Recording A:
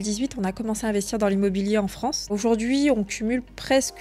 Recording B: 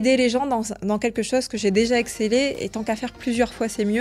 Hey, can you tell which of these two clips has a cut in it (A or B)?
A